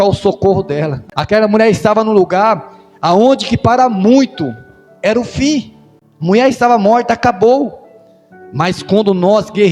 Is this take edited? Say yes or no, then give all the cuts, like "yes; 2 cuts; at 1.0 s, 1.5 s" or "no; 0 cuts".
yes; 1 cut; at 1.0 s